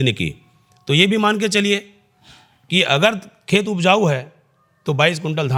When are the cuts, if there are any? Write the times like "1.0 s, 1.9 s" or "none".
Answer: none